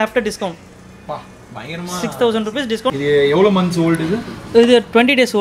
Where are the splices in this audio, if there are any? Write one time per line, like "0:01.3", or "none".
0:03.0